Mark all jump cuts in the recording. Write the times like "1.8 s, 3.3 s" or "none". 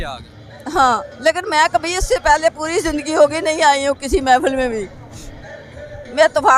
none